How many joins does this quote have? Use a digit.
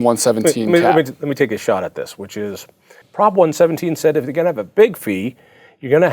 1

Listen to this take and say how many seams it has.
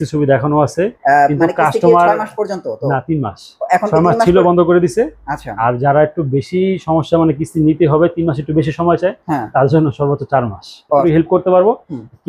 1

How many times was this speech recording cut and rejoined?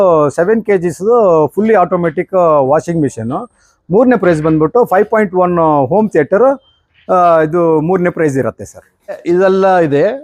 1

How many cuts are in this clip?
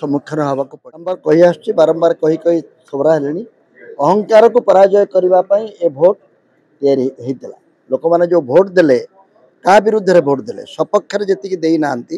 1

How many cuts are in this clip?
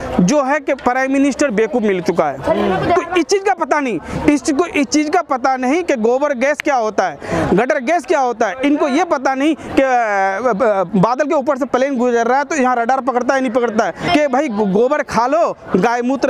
2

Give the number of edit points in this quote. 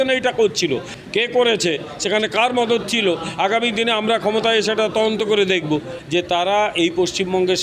2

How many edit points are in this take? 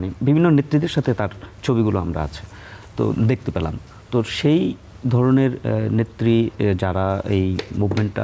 0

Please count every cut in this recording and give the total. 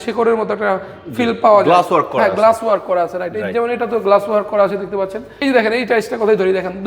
1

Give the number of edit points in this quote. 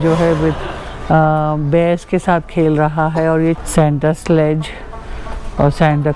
1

